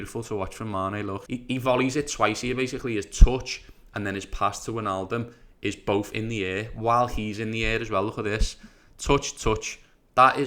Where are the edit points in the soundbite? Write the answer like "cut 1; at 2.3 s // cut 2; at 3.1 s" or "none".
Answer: cut 1; at 1.2 s